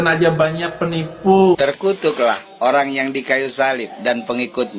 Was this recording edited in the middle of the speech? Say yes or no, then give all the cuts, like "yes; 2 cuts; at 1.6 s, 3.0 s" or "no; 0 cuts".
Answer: yes; 1 cut; at 1.6 s